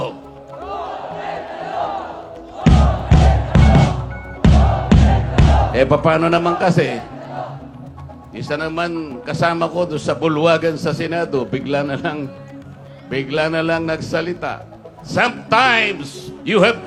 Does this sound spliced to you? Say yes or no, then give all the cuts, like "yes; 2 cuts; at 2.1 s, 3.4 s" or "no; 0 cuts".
no; 0 cuts